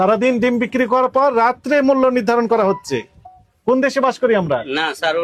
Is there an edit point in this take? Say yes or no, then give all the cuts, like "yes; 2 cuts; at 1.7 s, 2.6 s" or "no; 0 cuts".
no; 0 cuts